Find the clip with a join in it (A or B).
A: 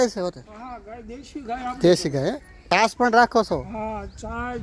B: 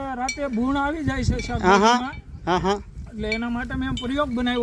A